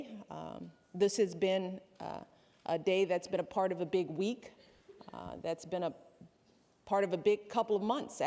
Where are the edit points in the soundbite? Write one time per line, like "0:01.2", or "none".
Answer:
0:04.4